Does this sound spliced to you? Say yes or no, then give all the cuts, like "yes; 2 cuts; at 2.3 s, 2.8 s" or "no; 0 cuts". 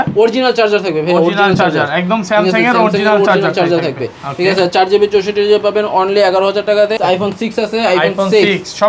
yes; 1 cut; at 7.0 s